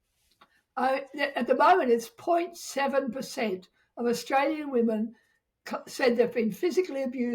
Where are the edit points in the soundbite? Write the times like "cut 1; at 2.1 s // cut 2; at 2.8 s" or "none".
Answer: none

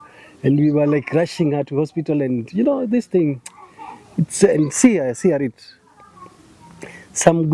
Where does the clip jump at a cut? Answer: none

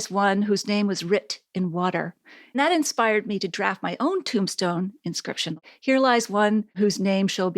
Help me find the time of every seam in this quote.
cut 1; at 2.6 s // cut 2; at 5.6 s // cut 3; at 6.8 s

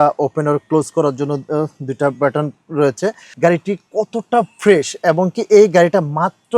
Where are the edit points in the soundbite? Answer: cut 1; at 3.2 s

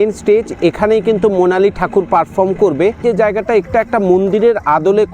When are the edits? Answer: cut 1; at 3.0 s

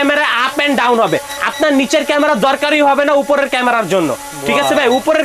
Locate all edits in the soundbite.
none

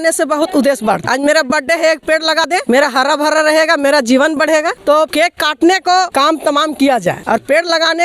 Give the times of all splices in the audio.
cut 1; at 1.0 s // cut 2; at 2.5 s // cut 3; at 5.0 s // cut 4; at 6.1 s // cut 5; at 7.2 s

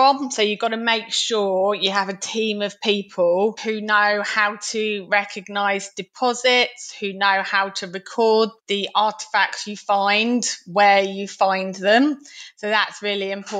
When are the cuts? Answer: cut 1; at 3.6 s // cut 2; at 8.6 s

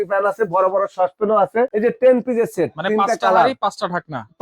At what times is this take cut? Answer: cut 1; at 1.7 s

